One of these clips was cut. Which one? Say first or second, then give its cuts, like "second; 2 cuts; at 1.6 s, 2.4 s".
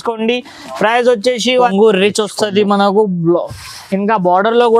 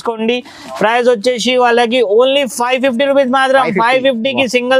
first; 1 cut; at 1.7 s